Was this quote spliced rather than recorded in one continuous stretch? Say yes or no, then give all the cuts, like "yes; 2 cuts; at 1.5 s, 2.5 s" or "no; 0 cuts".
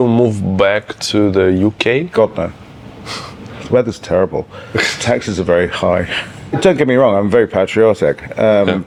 no; 0 cuts